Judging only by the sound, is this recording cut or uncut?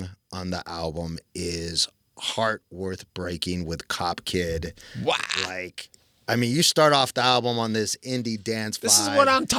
uncut